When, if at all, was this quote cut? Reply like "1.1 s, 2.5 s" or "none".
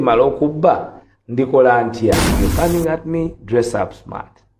2.3 s